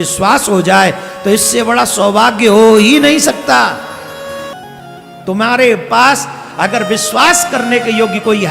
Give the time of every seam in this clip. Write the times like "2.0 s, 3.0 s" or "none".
4.5 s